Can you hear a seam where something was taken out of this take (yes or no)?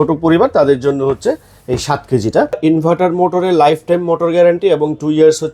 yes